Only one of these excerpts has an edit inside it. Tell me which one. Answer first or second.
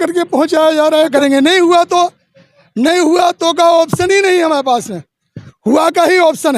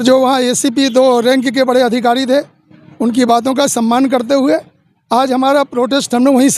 first